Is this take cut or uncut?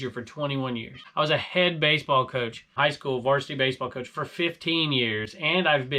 cut